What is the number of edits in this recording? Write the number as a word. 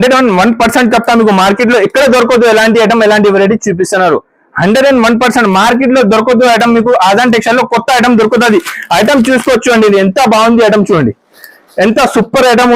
zero